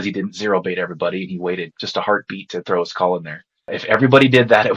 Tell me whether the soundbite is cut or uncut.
cut